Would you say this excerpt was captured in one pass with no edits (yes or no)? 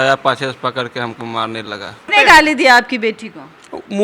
no